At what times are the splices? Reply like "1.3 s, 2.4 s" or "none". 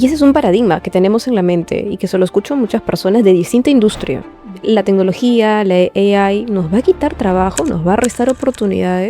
none